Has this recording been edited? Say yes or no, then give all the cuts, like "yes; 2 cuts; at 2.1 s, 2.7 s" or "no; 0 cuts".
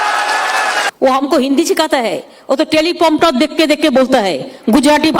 yes; 1 cut; at 0.9 s